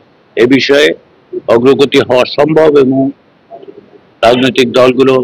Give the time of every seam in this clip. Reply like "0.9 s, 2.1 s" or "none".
none

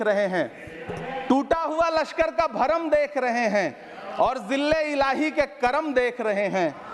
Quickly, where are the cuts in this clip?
none

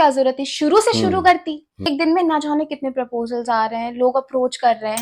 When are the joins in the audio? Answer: 1.9 s

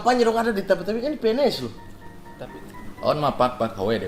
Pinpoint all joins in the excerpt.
2.5 s

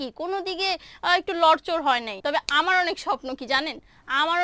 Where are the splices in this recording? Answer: 2.1 s

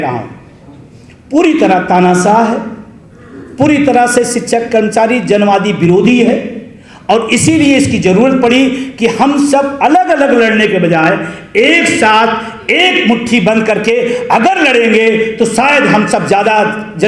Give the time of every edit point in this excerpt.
none

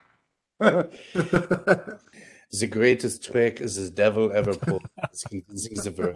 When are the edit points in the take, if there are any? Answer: 2.0 s

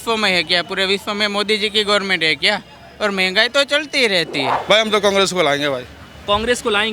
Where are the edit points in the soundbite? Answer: 4.5 s

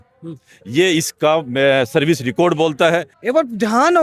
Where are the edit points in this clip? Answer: 3.1 s

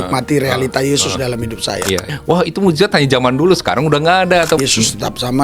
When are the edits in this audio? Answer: 2.1 s, 4.6 s

